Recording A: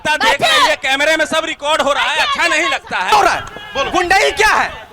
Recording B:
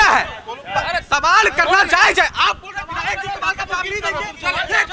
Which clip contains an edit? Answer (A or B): A